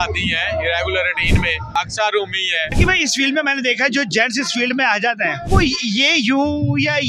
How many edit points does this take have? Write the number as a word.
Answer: three